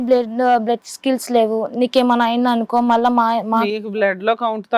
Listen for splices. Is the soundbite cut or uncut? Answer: uncut